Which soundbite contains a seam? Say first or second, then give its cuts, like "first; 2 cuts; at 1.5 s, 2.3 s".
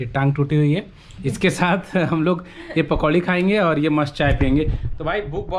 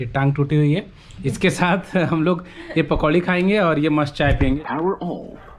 second; 1 cut; at 4.6 s